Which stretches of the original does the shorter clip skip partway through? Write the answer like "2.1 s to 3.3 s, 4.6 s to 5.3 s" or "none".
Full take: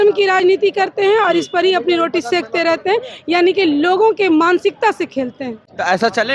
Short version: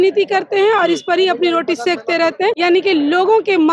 3.0 s to 3.3 s